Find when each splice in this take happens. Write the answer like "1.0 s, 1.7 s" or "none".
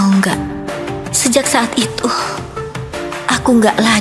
none

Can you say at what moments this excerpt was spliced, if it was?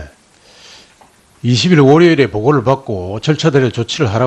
2.9 s

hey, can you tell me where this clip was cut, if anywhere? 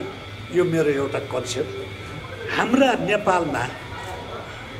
2.1 s

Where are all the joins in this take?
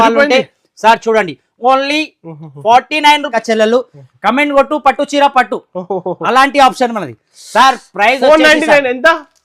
3.3 s

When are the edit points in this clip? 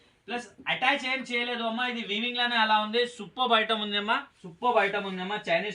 4.4 s

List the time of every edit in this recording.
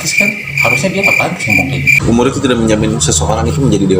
1.9 s

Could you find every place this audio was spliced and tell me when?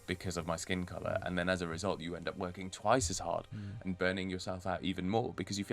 none

